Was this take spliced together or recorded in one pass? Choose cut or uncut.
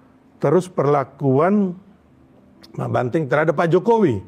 uncut